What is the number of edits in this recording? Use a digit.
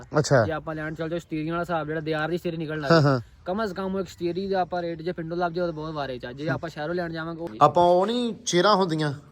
1